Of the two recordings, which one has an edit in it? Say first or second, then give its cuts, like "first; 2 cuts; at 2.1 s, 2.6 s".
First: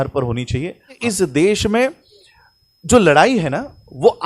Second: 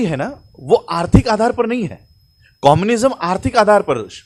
first; 1 cut; at 1.0 s